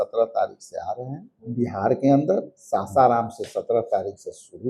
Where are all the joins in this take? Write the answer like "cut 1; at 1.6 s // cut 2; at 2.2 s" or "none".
cut 1; at 1.4 s